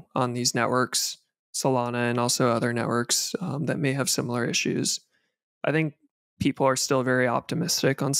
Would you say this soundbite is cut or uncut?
uncut